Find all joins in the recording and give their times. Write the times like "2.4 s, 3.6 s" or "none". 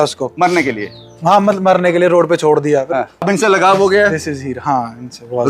3.3 s